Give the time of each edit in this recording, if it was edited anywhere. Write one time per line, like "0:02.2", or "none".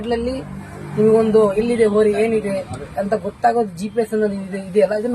0:01.8